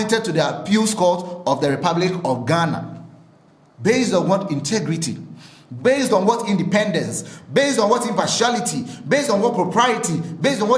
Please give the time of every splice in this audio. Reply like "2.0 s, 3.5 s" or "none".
none

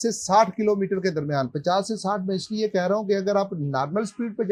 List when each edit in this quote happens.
none

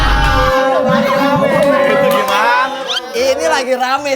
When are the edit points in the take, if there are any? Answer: 2.8 s

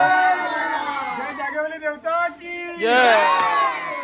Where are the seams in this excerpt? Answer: none

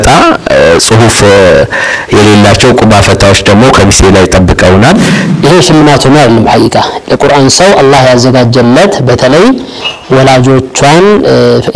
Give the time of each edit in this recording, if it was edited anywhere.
5.2 s

